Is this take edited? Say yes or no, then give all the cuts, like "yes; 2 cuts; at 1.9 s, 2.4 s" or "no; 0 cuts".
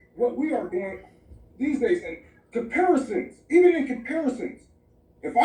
yes; 1 cut; at 2.1 s